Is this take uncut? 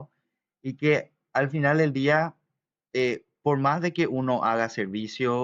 yes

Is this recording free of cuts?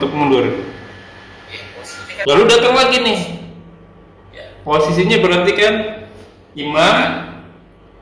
no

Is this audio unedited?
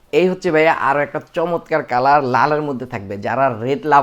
yes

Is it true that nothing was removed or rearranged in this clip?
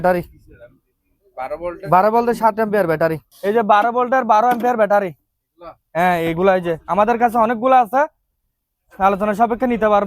no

